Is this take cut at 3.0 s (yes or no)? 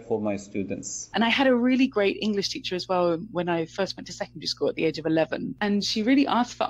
no